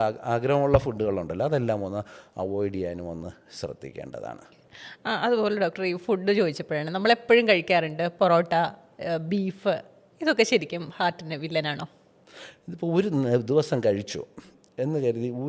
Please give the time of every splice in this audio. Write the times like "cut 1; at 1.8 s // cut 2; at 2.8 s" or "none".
none